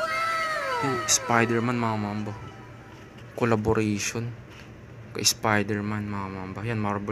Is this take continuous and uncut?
no; 1 cut; at 1.0 s

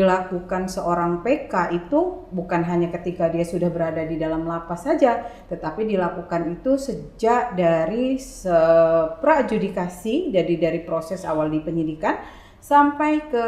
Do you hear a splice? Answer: no; 0 cuts

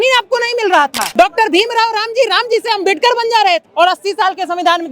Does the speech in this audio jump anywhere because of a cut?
yes; 2 cuts; at 1.0 s, 3.7 s

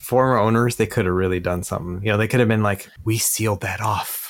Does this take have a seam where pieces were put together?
yes; 1 cut; at 2.9 s

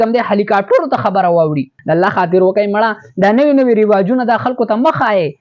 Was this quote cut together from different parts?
yes; 1 cut; at 1.7 s

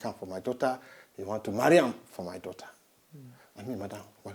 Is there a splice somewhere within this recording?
no; 0 cuts

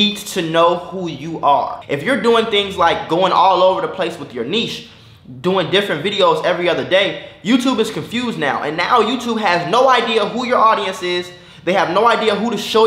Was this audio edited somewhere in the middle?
yes; 1 cut; at 1.8 s

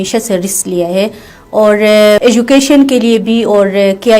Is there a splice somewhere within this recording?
no; 0 cuts

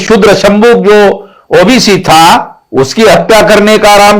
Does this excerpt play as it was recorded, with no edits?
yes; 0 cuts

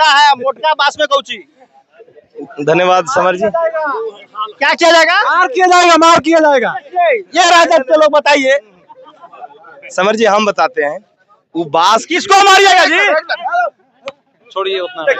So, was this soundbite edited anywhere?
no; 0 cuts

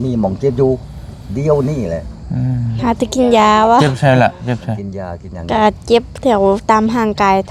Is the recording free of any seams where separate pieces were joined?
yes; 0 cuts

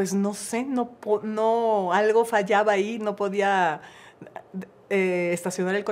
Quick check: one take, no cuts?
yes; 0 cuts

